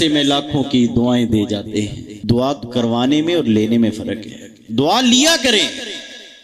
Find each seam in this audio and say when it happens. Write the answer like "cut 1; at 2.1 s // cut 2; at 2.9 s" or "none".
cut 1; at 2.1 s